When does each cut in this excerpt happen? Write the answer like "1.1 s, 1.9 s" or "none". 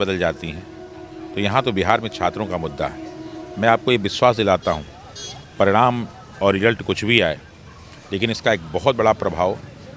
none